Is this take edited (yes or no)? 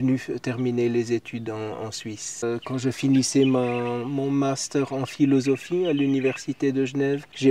yes